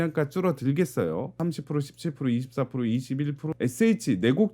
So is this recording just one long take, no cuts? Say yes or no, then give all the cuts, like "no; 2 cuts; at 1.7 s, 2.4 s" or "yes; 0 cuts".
no; 2 cuts; at 1.4 s, 3.5 s